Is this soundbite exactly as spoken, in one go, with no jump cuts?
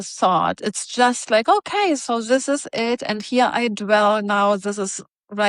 yes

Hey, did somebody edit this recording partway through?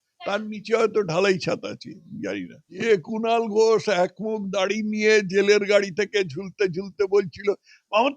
yes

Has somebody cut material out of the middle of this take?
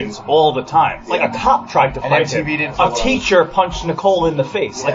yes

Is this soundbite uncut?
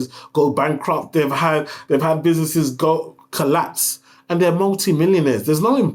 yes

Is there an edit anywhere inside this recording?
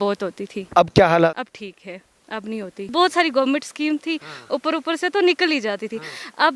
yes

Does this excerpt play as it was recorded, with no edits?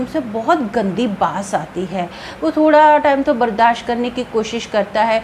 yes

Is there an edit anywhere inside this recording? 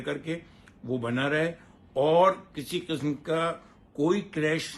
no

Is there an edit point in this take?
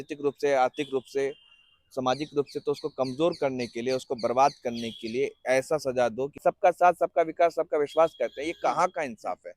yes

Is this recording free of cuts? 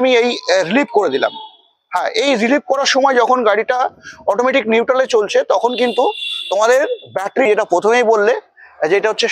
no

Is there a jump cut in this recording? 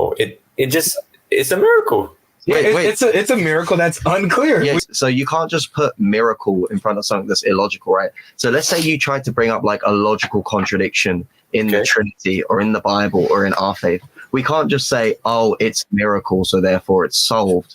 yes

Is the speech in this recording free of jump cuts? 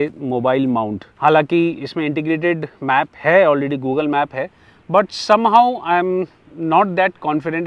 no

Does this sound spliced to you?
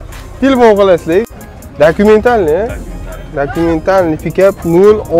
yes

